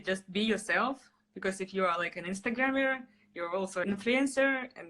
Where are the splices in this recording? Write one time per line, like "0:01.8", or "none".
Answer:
0:03.8